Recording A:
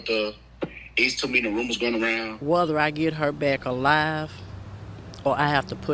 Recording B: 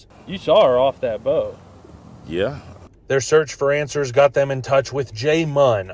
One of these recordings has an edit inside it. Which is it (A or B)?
A